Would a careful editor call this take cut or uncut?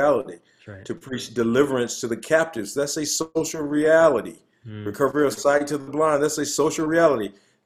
uncut